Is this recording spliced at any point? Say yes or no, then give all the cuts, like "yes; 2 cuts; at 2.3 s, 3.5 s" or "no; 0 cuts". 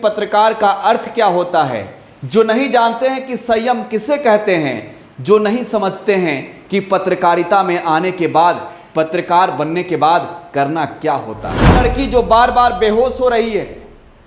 yes; 1 cut; at 11.8 s